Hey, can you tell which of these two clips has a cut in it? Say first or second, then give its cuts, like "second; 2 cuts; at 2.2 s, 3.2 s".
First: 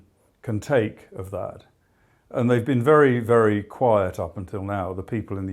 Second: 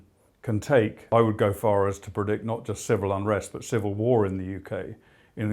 second; 1 cut; at 1.0 s